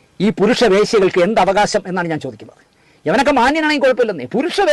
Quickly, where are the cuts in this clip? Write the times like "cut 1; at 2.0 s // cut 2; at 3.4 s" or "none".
none